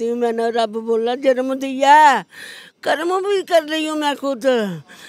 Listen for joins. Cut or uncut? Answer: uncut